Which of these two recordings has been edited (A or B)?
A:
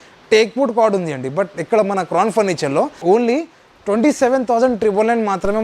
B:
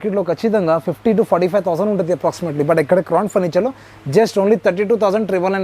A